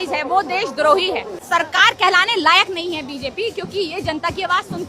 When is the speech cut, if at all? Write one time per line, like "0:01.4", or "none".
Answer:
0:01.4

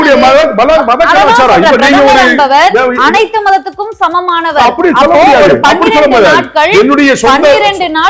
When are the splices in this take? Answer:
none

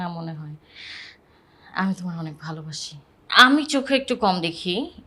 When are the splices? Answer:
0:03.2

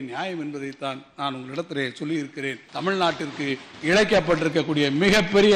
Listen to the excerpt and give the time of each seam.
0:02.6

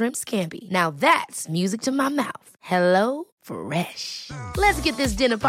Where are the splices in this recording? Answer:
none

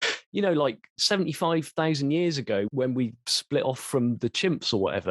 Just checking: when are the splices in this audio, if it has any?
0:02.7

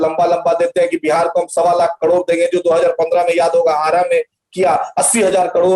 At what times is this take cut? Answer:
none

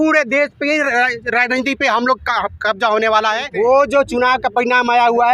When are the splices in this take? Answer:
0:03.4

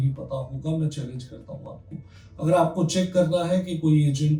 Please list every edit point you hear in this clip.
none

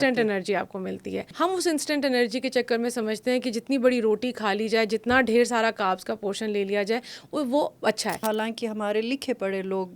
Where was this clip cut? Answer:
0:01.3
0:08.2

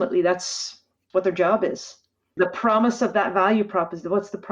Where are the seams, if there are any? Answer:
0:00.9
0:02.4

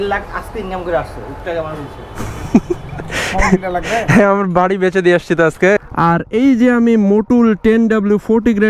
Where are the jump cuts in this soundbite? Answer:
0:05.8

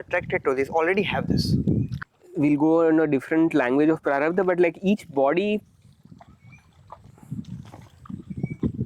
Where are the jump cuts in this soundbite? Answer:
0:01.9

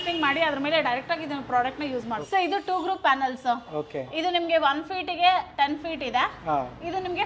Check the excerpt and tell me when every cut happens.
0:02.2

